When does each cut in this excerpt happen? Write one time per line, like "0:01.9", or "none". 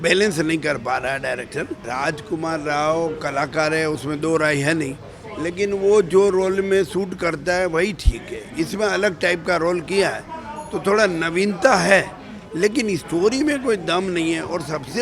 none

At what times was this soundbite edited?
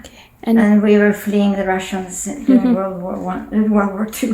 none

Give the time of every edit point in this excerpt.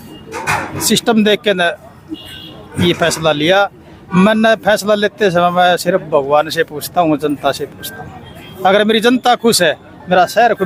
none

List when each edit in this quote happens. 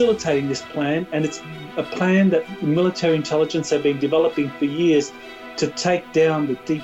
none

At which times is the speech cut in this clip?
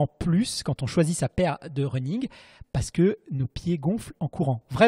none

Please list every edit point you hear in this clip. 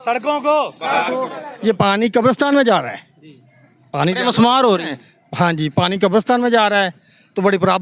0:01.3

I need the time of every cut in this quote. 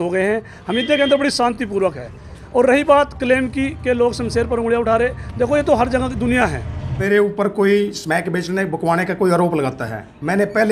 0:07.0

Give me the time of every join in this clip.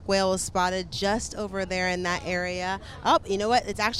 none

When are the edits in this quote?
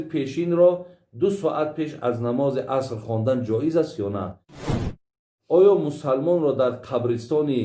0:04.8

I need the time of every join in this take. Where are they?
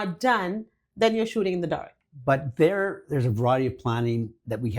0:01.9

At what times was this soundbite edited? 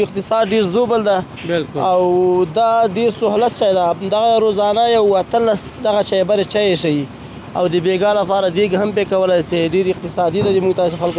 none

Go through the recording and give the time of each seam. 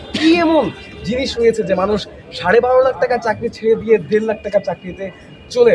none

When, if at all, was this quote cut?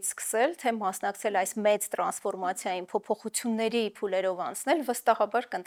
none

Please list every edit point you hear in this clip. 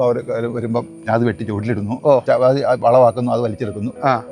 0:02.2

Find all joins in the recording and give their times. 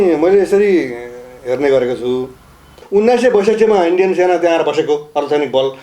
0:02.8

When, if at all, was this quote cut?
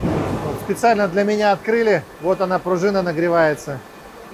none

